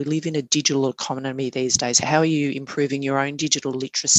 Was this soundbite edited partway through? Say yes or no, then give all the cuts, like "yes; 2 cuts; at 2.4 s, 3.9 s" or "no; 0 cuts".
yes; 1 cut; at 2.0 s